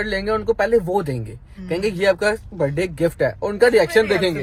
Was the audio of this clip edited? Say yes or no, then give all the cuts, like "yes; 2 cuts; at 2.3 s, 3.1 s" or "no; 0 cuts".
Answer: no; 0 cuts